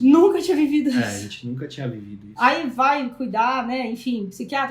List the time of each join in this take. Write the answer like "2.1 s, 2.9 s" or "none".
none